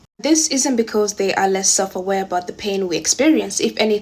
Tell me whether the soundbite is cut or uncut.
uncut